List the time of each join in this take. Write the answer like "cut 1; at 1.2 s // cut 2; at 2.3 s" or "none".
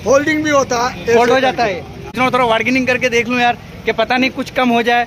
cut 1; at 2.0 s